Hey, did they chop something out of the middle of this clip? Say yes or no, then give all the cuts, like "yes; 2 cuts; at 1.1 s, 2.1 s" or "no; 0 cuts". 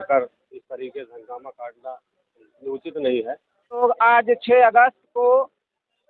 yes; 1 cut; at 3.8 s